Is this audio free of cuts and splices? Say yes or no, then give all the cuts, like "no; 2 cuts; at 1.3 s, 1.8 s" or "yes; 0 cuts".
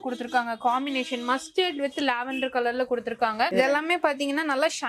no; 1 cut; at 3.5 s